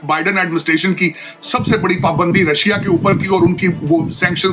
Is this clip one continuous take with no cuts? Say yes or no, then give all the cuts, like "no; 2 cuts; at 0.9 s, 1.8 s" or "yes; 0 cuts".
yes; 0 cuts